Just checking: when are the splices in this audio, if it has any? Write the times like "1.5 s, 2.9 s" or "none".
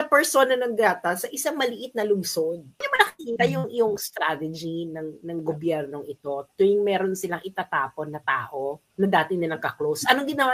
2.9 s